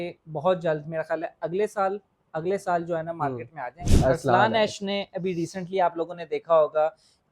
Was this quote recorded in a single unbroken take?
no; 1 cut; at 3.8 s

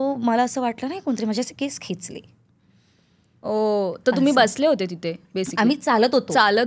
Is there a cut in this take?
no; 0 cuts

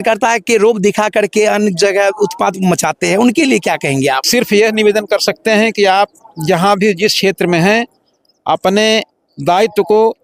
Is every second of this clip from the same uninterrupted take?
no; 1 cut; at 4.2 s

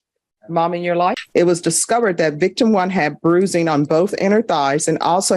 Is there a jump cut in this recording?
yes; 1 cut; at 1.2 s

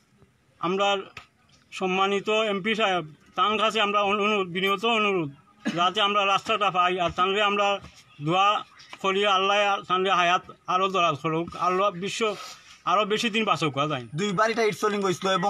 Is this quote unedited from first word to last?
no; 1 cut; at 14.0 s

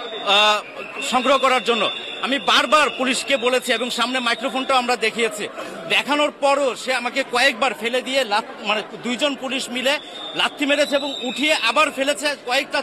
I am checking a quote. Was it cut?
no; 0 cuts

